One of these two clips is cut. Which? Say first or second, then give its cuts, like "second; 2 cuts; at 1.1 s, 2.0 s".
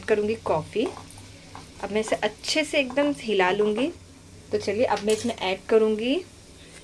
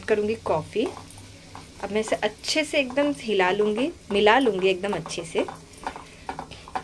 first; 1 cut; at 4.0 s